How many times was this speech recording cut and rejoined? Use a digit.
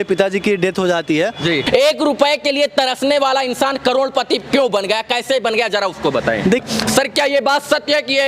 2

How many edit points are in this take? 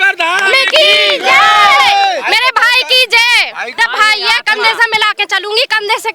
1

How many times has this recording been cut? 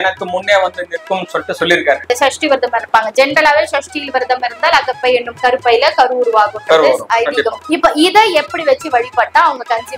1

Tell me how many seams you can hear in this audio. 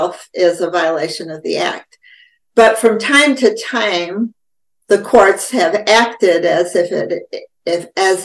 0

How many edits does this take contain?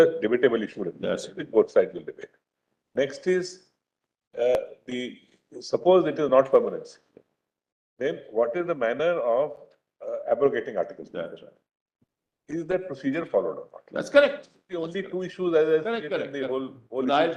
0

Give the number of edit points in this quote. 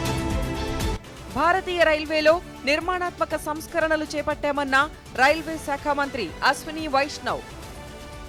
0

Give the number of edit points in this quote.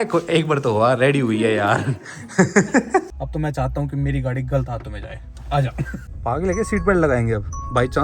2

